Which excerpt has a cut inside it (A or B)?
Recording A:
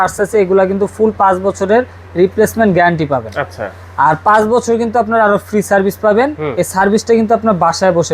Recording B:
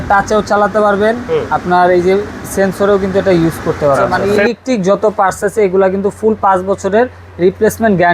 B